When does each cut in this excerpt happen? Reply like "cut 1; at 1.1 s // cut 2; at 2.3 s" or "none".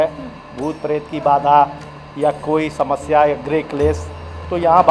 none